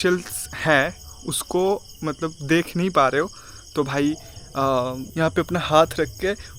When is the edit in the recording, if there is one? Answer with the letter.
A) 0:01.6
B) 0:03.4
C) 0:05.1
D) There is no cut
C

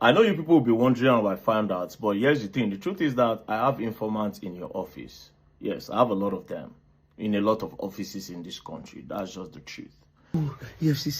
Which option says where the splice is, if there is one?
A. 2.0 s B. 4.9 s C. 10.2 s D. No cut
C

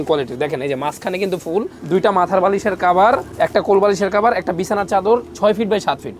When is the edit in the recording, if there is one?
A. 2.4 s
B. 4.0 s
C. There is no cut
C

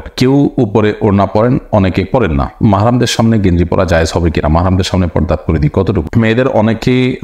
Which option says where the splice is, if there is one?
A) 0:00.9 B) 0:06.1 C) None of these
B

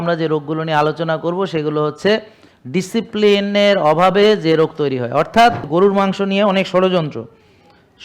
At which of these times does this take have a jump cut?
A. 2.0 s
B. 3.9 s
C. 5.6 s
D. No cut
C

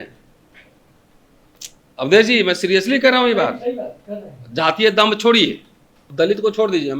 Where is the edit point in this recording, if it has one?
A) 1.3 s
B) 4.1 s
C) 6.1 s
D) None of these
C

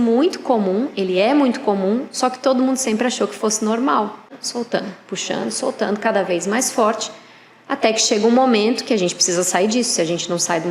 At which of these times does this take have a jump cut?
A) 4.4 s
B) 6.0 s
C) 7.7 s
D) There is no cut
A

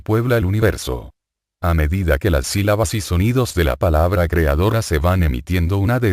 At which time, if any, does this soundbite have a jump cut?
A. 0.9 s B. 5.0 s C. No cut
B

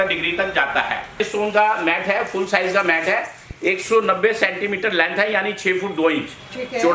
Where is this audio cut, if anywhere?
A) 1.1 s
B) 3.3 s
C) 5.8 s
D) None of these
A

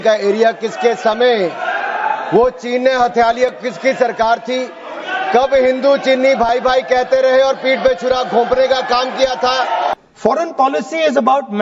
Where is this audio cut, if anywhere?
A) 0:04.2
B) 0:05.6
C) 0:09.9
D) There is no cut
C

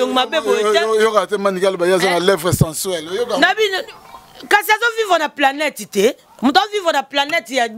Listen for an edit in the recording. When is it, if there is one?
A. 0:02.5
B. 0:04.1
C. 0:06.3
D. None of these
D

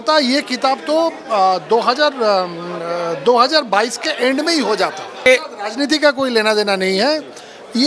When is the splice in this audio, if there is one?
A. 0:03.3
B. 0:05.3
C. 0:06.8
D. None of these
B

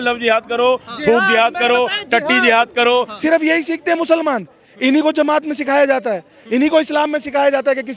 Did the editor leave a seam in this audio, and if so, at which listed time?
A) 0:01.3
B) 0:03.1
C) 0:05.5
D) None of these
B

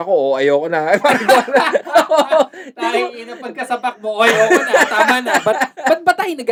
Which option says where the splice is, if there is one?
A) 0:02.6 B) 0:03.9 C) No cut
C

